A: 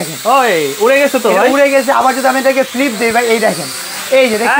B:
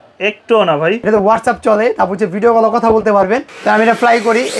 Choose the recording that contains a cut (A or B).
B